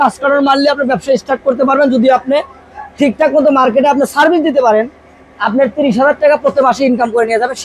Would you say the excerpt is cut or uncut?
uncut